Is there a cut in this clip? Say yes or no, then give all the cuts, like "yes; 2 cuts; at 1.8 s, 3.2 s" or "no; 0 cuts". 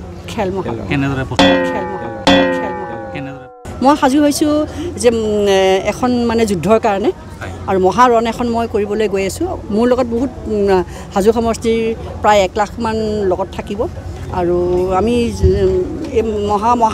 yes; 1 cut; at 1.0 s